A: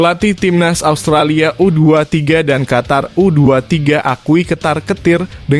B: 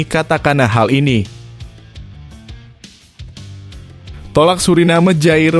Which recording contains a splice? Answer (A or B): B